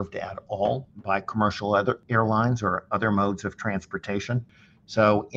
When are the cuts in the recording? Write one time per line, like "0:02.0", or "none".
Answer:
0:00.9
0:02.0
0:04.5